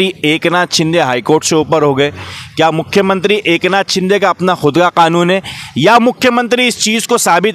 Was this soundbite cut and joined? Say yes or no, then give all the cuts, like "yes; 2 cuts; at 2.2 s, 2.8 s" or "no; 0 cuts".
no; 0 cuts